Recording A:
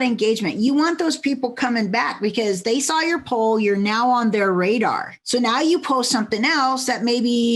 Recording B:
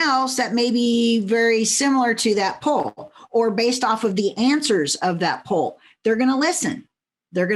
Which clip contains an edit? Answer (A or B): A